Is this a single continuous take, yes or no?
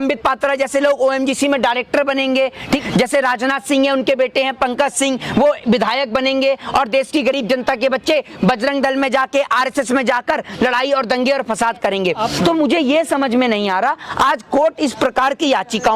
no